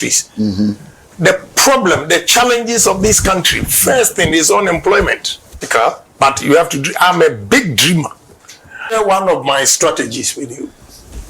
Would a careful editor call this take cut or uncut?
cut